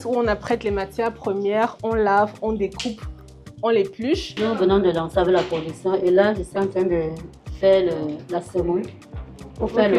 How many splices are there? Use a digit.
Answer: 1